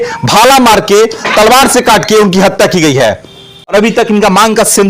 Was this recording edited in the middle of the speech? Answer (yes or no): yes